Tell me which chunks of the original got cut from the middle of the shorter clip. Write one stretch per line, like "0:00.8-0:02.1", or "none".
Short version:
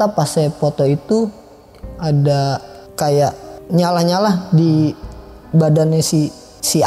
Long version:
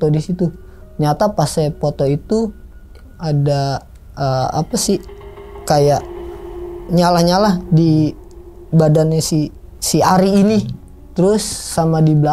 0:04.0-0:05.5
0:06.2-0:06.7